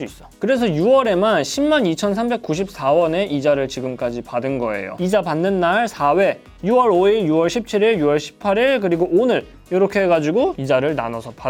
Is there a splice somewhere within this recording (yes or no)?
no